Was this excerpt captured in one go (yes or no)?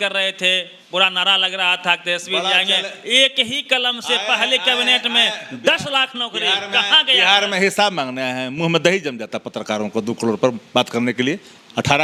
yes